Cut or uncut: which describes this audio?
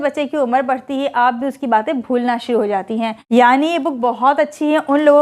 cut